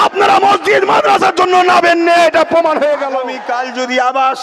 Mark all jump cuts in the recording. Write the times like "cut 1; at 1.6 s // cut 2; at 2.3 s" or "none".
cut 1; at 3.3 s

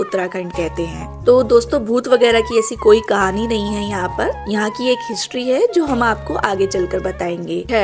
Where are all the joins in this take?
none

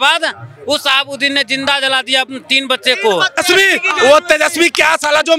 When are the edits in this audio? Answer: cut 1; at 3.4 s

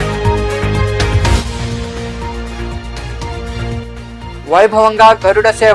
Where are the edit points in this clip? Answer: cut 1; at 1.1 s

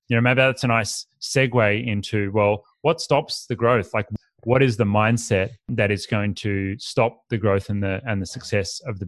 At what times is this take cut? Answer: cut 1; at 4.0 s // cut 2; at 5.7 s

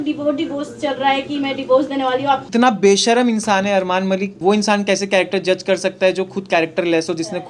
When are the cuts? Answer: cut 1; at 2.5 s // cut 2; at 4.4 s

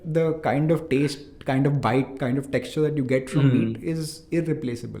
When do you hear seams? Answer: none

